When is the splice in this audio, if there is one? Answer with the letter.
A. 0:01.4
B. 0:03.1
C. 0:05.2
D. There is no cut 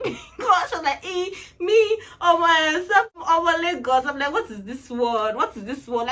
B